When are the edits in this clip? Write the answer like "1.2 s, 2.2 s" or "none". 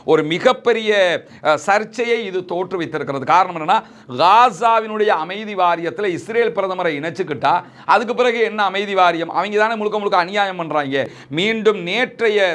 11.2 s